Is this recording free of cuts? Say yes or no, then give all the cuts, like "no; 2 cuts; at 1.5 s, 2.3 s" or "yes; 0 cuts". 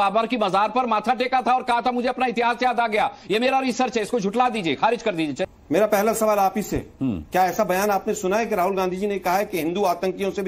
no; 1 cut; at 5.5 s